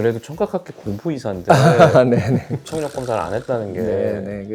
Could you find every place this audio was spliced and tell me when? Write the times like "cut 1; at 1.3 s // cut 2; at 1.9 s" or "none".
cut 1; at 2.5 s

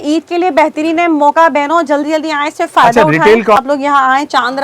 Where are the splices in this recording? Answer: cut 1; at 3.6 s

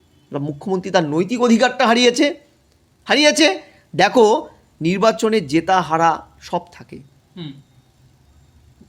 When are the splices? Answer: none

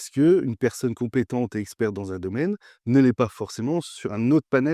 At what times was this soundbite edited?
none

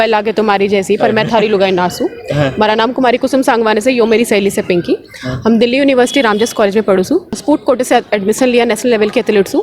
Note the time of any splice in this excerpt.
cut 1; at 7.4 s

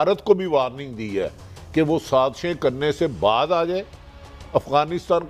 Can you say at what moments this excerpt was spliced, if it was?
none

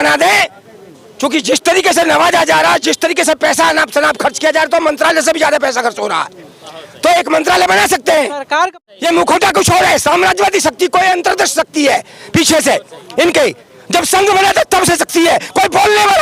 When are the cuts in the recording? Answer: cut 1; at 8.8 s

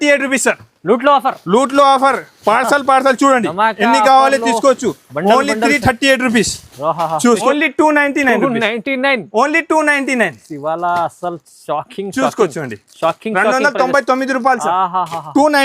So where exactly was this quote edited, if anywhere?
cut 1; at 7.5 s

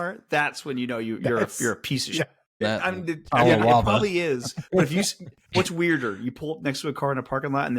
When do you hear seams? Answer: cut 1; at 2.4 s

